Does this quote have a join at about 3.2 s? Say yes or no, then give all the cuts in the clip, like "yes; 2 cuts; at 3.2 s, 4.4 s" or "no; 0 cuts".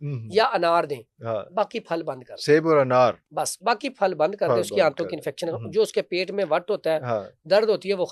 no; 0 cuts